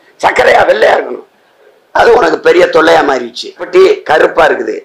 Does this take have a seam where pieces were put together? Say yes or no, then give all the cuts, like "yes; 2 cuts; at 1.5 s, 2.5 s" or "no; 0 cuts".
yes; 1 cut; at 3.6 s